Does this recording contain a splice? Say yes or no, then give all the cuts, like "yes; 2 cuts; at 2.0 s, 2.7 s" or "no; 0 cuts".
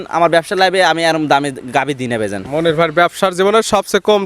no; 0 cuts